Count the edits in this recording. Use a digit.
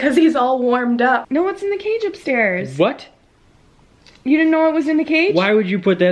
1